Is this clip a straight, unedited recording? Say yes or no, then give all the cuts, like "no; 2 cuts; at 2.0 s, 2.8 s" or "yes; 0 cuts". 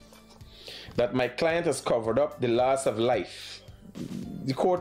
yes; 0 cuts